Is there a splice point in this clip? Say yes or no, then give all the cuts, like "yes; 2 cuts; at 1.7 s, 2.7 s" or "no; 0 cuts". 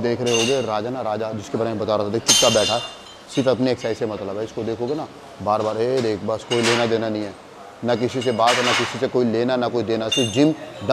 no; 0 cuts